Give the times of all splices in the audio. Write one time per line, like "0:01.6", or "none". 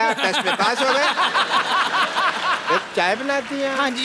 0:02.8